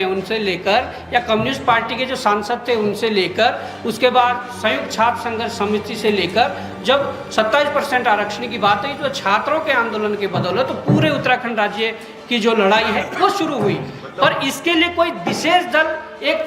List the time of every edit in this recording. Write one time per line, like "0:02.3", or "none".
none